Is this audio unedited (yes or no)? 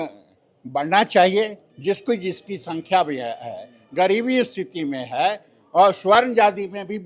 yes